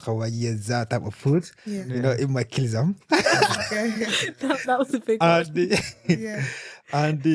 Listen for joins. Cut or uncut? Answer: uncut